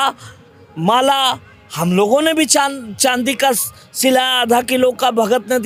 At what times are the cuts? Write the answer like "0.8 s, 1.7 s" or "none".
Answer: none